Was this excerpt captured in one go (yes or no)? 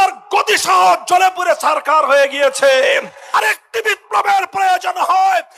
no